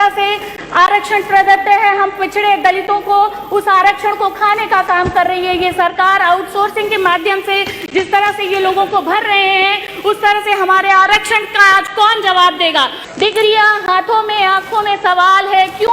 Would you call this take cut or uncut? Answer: cut